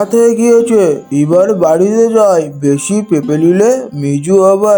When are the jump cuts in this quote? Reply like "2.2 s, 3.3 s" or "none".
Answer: none